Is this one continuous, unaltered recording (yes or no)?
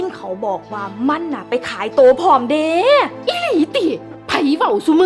no